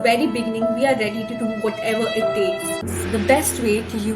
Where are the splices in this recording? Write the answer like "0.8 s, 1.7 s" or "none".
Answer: 2.8 s